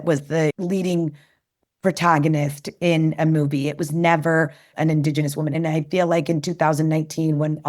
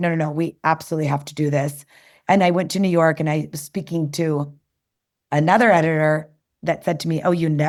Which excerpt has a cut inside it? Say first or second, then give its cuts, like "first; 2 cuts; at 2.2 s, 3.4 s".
first; 2 cuts; at 4.7 s, 5.6 s